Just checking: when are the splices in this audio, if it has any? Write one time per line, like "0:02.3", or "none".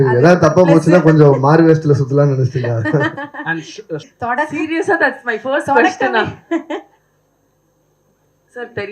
0:04.1

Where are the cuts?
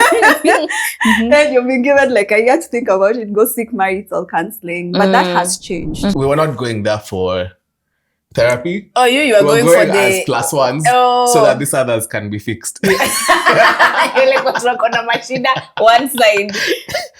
0:06.2

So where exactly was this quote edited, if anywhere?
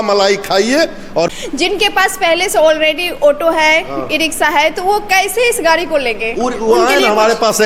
0:01.4

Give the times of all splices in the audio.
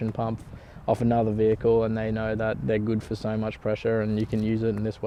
none

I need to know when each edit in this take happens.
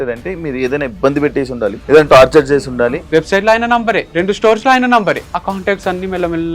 0:01.8
0:03.0
0:04.1
0:05.3

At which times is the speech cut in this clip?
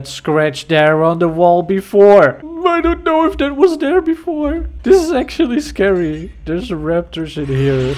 0:02.5
0:04.7

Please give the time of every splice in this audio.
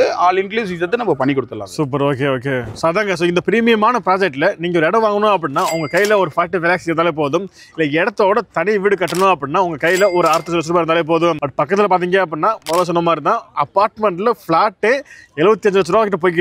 none

